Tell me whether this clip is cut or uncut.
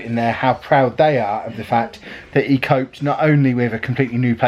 uncut